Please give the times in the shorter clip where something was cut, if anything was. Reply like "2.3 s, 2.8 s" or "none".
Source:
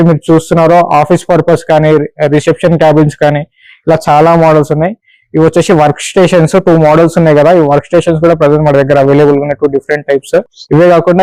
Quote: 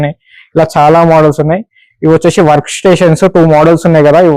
none